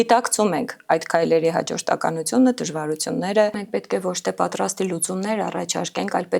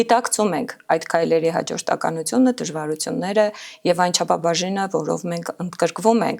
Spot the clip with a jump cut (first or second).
first